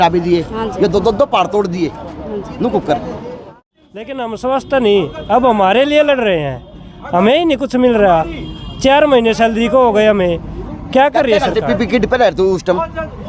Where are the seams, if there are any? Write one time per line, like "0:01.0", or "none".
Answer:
0:03.5